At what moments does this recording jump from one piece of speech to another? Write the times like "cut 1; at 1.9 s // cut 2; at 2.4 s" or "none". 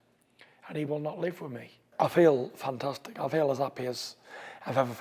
cut 1; at 1.9 s